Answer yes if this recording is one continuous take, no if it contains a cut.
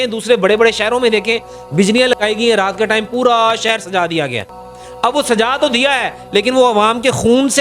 yes